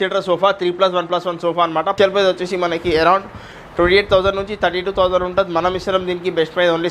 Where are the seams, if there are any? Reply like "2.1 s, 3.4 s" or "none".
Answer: 1.9 s